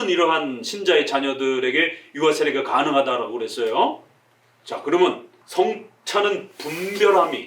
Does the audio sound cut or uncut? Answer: cut